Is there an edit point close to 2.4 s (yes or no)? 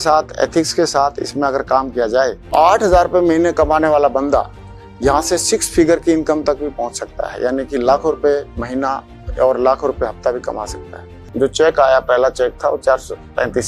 yes